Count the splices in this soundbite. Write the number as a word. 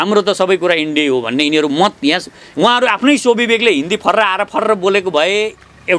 one